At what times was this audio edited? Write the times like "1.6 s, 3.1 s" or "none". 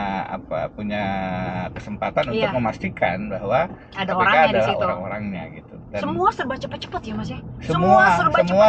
none